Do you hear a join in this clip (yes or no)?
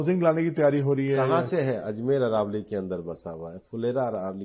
no